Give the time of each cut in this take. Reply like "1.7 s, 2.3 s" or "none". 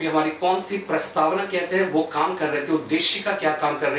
none